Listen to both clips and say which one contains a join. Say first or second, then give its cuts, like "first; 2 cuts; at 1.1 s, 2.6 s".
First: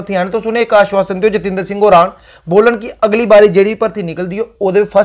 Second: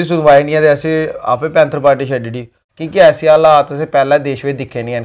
second; 1 cut; at 2.6 s